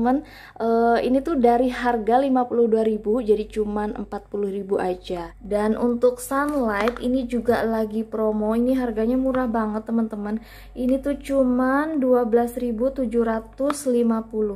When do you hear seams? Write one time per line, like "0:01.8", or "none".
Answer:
0:05.3